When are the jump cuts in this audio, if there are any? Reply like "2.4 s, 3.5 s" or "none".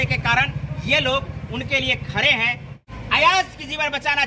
2.8 s